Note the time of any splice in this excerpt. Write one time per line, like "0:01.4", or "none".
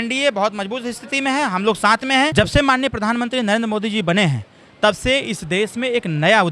0:02.3